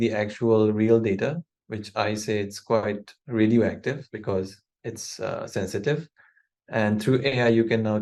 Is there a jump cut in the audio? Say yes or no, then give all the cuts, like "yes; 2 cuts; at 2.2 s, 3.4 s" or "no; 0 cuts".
no; 0 cuts